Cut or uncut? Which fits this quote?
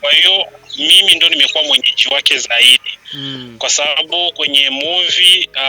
uncut